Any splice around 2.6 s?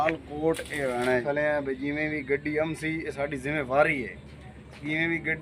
no; 1 cut; at 1.2 s

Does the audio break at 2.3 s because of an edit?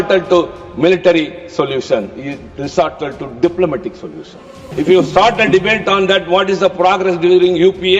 no; 1 cut; at 4.7 s

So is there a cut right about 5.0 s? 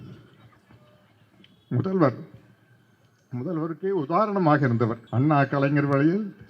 yes; 1 cut; at 5.0 s

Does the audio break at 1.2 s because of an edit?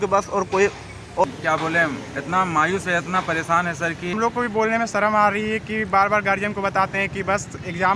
yes; 2 cuts; at 1.2 s, 4.2 s

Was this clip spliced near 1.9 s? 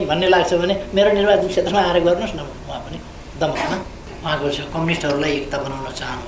no; 1 cut; at 4.0 s

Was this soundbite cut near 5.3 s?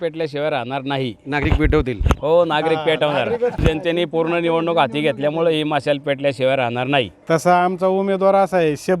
no; 2 cuts; at 3.6 s, 7.2 s

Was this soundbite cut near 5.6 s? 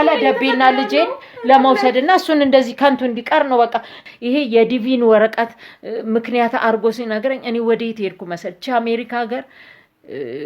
no; 1 cut; at 3.9 s

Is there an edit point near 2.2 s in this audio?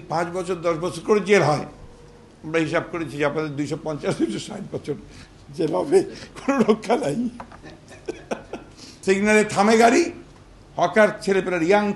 no; 1 cut; at 8.9 s

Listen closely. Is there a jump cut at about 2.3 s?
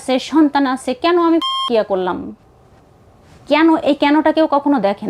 yes; 1 cut; at 2.3 s

